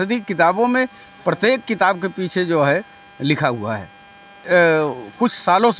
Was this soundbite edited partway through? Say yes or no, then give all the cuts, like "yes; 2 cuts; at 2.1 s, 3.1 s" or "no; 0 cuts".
yes; 1 cut; at 4.4 s